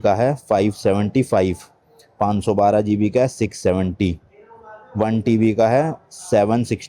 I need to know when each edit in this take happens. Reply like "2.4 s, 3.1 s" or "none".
none